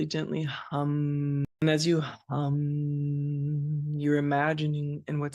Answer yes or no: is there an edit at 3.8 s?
no